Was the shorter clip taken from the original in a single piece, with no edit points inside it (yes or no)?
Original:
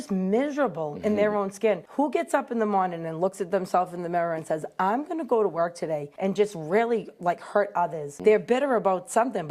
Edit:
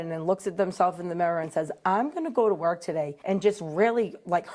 yes